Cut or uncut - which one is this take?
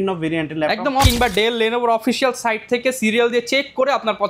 cut